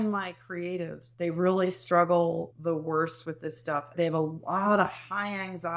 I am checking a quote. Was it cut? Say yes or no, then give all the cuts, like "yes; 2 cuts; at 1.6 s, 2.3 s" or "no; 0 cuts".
yes; 2 cuts; at 1.0 s, 2.5 s